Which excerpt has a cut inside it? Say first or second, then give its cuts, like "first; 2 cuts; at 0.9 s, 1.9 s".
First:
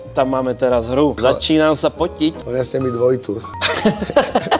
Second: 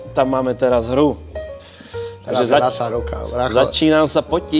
first; 3 cuts; at 1.2 s, 2.4 s, 3.5 s